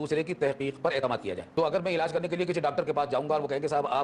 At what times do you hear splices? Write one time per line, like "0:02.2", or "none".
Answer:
0:01.4